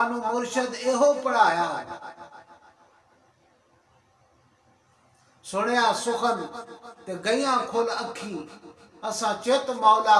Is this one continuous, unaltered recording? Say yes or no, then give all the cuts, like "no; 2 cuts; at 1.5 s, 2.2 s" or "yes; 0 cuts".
yes; 0 cuts